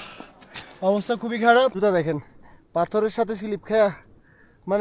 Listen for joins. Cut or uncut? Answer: cut